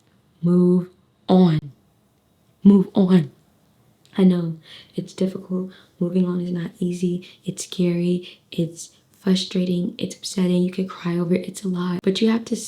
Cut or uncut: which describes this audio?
uncut